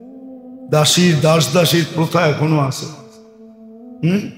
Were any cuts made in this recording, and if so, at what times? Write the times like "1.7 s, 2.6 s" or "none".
none